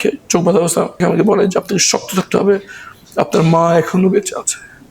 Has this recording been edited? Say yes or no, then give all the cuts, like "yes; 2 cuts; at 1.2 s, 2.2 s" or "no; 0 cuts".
yes; 1 cut; at 1.0 s